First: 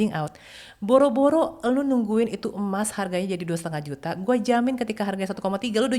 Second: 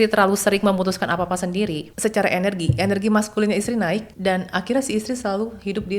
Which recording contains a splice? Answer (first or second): second